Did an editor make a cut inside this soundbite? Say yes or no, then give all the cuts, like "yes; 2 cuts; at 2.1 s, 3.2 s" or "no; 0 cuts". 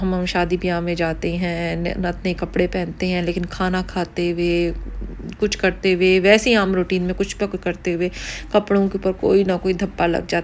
no; 0 cuts